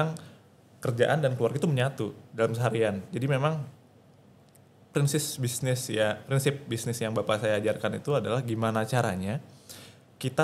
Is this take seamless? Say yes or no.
yes